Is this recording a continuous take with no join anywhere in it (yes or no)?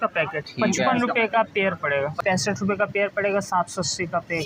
no